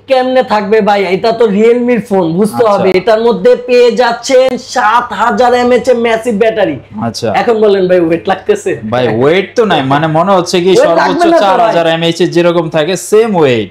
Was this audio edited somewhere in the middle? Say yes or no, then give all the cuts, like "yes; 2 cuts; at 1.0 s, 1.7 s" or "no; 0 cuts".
no; 0 cuts